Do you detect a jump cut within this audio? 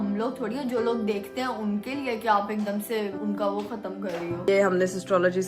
yes; 2 cuts; at 3.2 s, 4.5 s

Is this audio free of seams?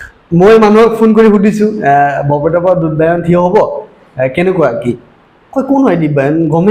yes; 0 cuts

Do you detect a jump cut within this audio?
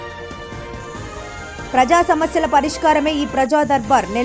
yes; 1 cut; at 1.2 s

